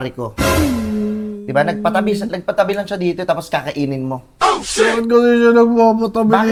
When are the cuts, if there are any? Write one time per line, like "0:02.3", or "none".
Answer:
none